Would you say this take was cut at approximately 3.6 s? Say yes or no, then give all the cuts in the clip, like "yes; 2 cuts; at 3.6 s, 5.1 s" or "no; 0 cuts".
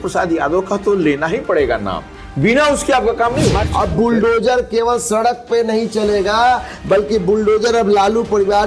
yes; 1 cut; at 3.6 s